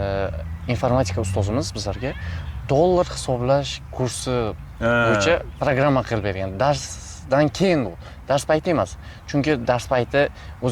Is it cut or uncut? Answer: uncut